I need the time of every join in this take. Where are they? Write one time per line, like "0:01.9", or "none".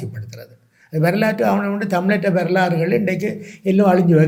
none